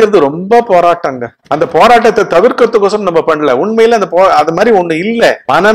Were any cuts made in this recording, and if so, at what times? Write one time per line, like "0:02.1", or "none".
none